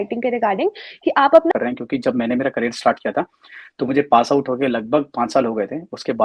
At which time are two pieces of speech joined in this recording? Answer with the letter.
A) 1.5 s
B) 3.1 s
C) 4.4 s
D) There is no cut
A